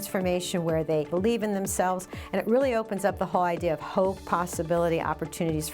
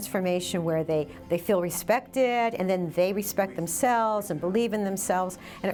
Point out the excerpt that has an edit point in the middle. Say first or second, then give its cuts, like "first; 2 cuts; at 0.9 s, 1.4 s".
first; 1 cut; at 1.1 s